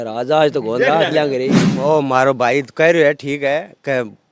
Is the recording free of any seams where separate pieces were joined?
no; 1 cut; at 1.5 s

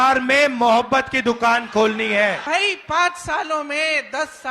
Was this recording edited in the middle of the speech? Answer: yes; 1 cut; at 2.4 s

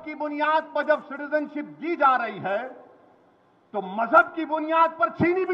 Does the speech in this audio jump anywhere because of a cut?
no; 0 cuts

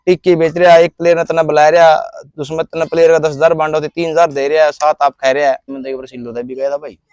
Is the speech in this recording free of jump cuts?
no; 1 cut; at 5.7 s

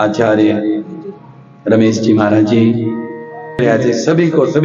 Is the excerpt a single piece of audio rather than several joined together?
no; 1 cut; at 3.6 s

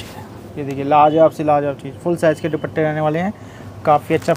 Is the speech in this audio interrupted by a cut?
no; 0 cuts

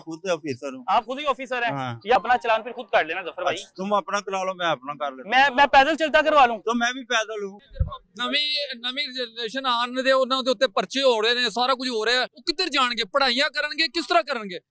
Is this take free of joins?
no; 3 cuts; at 2.2 s, 7.6 s, 12.4 s

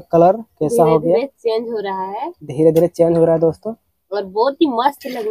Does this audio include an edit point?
no; 0 cuts

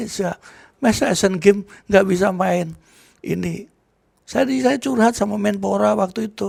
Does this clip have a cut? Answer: no; 0 cuts

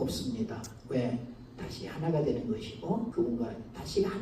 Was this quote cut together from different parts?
yes; 1 cut; at 3.1 s

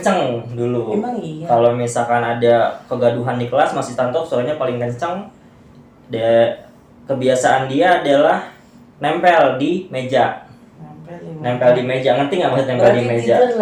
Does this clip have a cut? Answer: no; 0 cuts

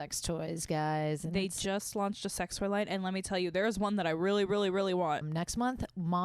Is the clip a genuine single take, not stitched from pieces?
yes; 0 cuts

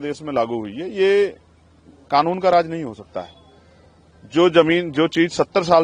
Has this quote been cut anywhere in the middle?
no; 0 cuts

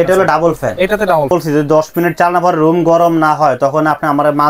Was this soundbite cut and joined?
yes; 1 cut; at 1.3 s

